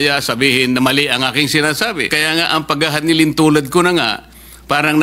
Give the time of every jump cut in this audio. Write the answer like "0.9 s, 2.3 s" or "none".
2.2 s